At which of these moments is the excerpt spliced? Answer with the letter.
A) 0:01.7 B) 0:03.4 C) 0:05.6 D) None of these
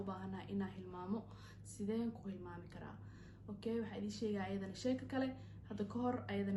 D